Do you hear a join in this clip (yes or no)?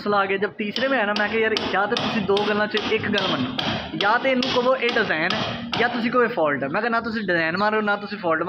no